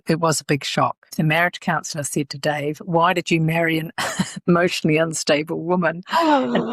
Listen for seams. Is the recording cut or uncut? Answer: cut